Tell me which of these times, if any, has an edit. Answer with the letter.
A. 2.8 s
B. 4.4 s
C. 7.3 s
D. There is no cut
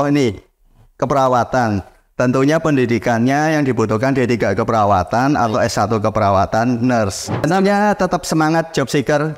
C